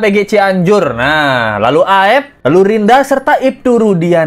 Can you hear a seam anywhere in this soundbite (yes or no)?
no